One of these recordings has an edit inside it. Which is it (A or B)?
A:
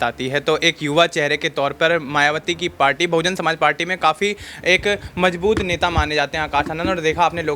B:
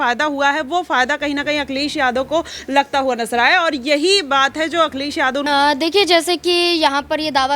B